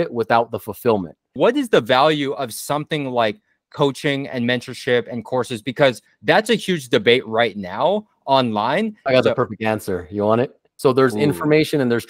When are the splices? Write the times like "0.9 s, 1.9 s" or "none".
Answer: 1.4 s, 9.0 s, 10.6 s